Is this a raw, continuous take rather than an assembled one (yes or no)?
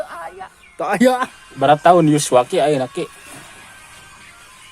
no